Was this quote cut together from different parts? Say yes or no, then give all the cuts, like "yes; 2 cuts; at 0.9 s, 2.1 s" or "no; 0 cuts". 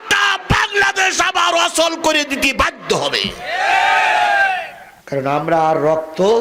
no; 0 cuts